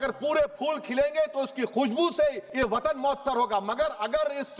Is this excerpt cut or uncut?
cut